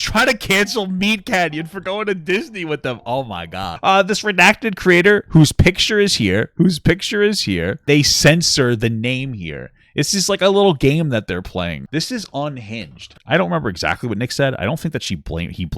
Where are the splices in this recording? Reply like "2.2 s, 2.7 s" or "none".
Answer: 3.7 s, 7.8 s, 11.8 s, 13.2 s